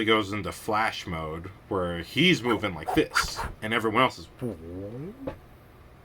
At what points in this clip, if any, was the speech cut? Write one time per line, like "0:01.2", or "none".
0:01.5
0:04.3